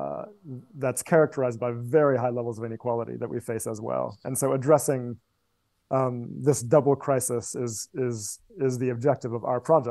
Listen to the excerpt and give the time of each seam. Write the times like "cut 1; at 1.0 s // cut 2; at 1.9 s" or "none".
none